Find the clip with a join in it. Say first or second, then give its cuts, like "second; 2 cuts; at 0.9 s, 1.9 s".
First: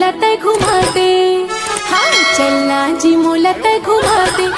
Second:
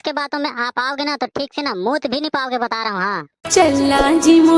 second; 1 cut; at 3.4 s